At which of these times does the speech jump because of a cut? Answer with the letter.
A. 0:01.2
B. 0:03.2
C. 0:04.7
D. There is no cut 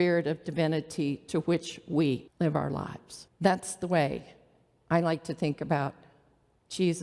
D